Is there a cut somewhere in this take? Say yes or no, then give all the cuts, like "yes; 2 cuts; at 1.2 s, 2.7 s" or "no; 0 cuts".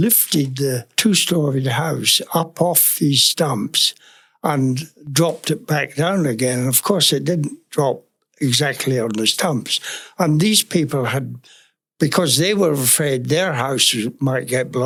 no; 0 cuts